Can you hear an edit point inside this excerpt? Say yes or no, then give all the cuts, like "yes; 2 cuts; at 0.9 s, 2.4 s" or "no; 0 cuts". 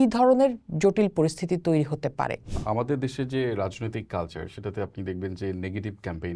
yes; 1 cut; at 2.5 s